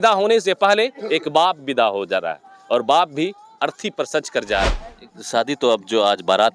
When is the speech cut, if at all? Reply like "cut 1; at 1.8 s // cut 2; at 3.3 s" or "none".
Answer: cut 1; at 4.7 s